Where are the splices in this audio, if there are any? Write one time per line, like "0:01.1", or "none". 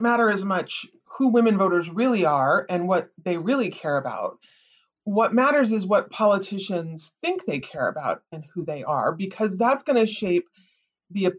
none